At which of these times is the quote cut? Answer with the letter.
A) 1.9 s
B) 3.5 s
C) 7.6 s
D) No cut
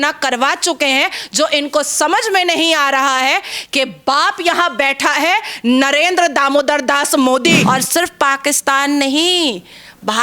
C